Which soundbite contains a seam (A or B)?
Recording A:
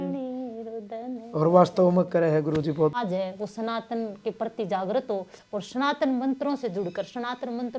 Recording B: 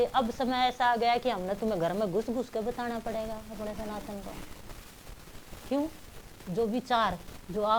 A